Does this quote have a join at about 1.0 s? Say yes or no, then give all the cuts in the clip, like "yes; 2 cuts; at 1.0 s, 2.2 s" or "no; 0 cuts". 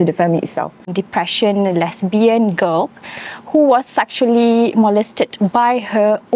yes; 1 cut; at 1.0 s